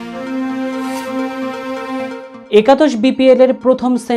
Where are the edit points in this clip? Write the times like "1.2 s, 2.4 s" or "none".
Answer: none